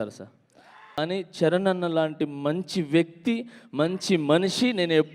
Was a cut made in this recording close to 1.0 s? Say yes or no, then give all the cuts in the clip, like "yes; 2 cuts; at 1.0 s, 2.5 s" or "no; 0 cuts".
yes; 1 cut; at 1.0 s